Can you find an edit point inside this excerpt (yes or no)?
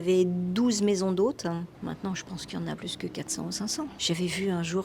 yes